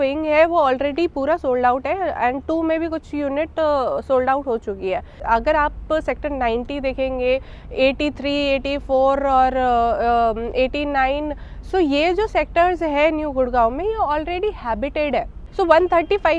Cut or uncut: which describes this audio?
cut